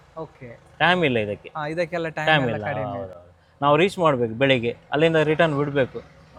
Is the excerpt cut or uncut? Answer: uncut